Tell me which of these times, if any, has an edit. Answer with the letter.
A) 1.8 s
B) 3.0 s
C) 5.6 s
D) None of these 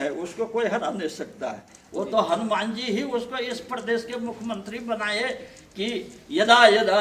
A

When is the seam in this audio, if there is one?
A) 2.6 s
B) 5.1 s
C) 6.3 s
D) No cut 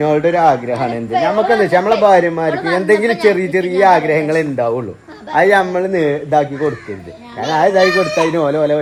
D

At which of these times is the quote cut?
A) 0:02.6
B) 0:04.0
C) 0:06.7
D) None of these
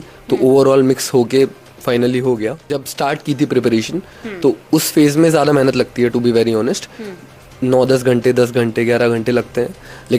A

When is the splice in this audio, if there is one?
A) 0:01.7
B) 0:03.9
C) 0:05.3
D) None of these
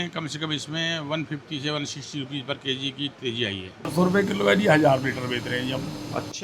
B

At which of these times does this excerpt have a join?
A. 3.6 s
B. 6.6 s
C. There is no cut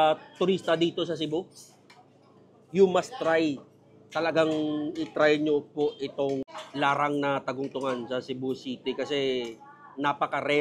B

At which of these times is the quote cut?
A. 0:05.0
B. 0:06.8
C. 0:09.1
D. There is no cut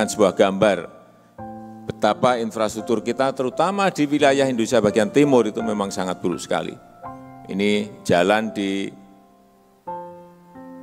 C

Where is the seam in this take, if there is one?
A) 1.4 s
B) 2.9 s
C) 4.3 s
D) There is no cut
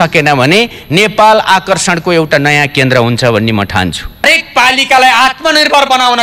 C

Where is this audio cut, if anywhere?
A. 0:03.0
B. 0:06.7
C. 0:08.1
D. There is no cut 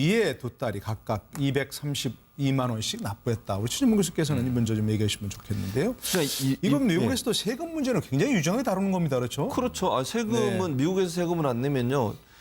B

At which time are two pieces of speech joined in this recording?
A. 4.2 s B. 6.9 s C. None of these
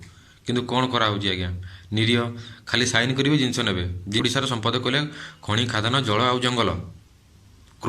A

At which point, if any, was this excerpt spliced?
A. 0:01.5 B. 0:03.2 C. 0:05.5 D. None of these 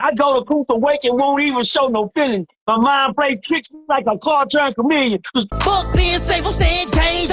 C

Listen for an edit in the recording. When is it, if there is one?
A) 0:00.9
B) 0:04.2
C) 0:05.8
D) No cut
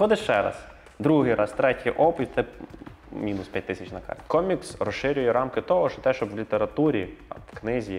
B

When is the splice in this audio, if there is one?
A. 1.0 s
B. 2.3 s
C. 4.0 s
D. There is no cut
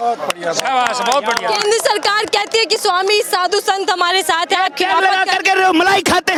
D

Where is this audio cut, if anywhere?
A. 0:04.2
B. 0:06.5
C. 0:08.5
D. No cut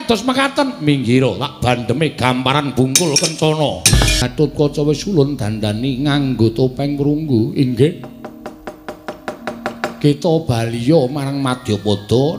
A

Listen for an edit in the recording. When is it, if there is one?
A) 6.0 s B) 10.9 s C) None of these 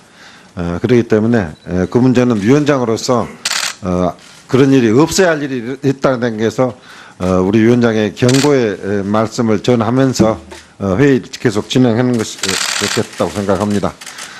A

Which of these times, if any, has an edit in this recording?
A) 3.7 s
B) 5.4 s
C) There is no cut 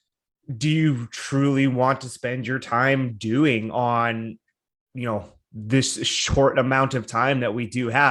C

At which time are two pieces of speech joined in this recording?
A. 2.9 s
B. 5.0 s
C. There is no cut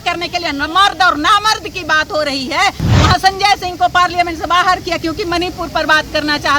A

